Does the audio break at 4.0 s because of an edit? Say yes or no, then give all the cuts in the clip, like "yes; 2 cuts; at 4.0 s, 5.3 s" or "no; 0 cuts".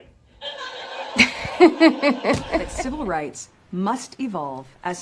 no; 1 cut; at 2.8 s